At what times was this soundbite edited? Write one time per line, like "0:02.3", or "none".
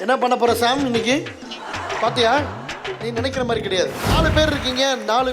0:04.0